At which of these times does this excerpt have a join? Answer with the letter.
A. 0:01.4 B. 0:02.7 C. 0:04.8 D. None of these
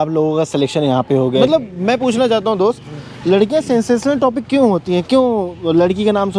A